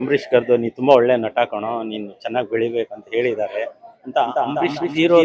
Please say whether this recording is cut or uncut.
uncut